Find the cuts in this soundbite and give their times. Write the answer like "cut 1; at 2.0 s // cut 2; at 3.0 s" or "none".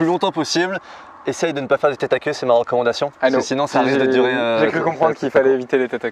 none